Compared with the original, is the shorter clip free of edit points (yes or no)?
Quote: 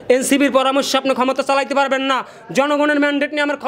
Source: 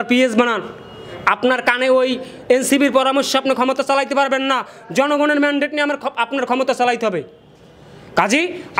yes